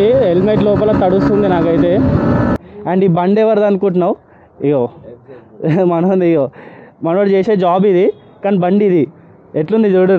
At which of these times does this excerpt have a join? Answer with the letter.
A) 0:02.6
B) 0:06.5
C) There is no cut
A